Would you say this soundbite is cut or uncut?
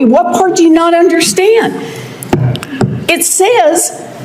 uncut